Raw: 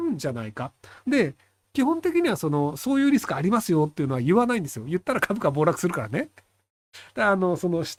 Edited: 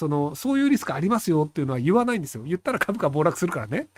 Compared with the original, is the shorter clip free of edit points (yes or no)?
yes